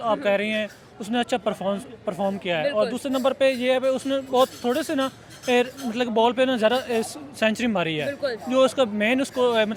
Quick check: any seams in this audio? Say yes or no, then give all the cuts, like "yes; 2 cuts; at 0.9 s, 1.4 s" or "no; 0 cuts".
no; 0 cuts